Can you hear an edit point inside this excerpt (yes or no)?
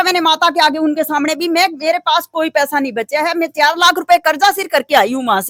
no